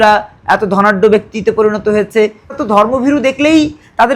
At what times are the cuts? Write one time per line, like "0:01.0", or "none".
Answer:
0:02.6